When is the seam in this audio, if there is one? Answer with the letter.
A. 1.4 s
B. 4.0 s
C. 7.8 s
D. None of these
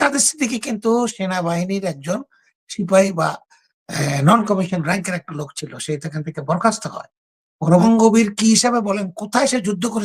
C